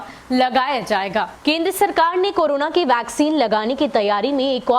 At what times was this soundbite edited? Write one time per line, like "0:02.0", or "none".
0:01.3